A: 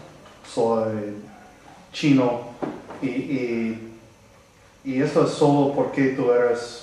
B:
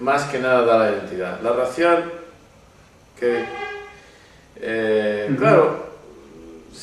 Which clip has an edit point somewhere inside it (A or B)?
A